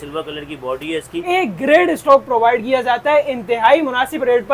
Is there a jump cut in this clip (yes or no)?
yes